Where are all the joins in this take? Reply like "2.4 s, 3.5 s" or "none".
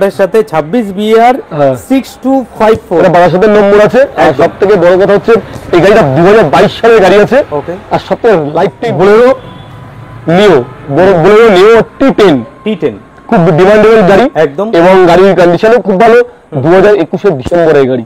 8.8 s